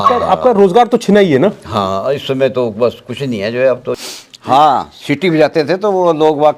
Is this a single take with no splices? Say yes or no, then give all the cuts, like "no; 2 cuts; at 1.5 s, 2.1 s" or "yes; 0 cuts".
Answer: no; 1 cut; at 3.9 s